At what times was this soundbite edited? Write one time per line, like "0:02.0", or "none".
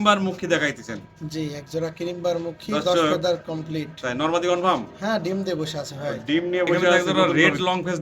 0:07.0